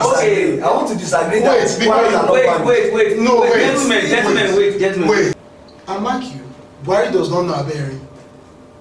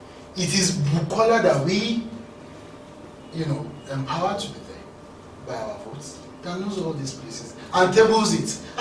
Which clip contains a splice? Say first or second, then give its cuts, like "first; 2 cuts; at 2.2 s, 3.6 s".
first; 1 cut; at 5.4 s